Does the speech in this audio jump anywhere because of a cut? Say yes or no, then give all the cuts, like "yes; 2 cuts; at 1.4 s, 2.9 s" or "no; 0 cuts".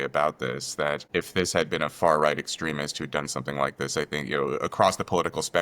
yes; 1 cut; at 1.0 s